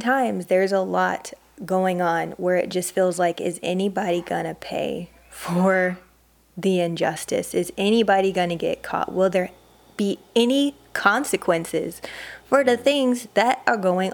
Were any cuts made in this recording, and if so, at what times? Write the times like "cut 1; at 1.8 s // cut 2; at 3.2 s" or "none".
none